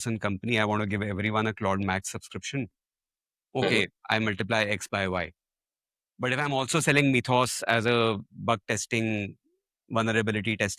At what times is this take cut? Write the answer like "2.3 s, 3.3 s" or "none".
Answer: none